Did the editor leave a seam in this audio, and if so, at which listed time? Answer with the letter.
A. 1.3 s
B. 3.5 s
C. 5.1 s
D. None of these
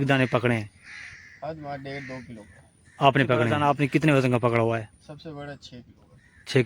B